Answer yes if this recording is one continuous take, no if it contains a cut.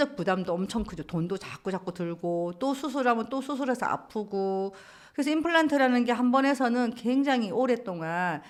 yes